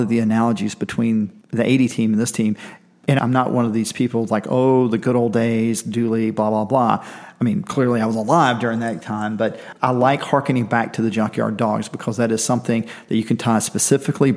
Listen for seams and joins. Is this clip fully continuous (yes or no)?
no